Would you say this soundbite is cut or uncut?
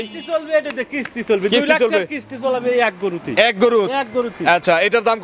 uncut